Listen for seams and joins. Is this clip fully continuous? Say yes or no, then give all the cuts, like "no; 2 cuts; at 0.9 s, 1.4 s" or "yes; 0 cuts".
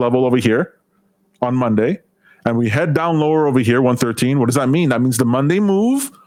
yes; 0 cuts